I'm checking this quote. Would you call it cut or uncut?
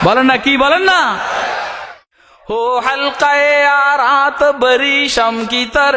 cut